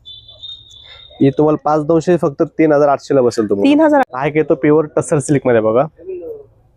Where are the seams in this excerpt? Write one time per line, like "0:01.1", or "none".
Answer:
0:04.0